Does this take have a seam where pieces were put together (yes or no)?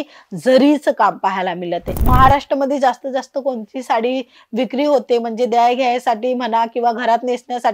yes